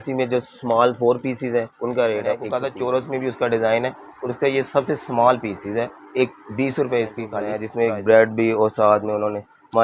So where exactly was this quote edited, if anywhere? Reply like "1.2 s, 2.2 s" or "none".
2.6 s, 7.6 s